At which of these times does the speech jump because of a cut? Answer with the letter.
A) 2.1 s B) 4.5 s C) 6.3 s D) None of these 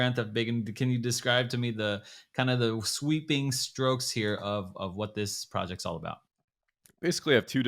C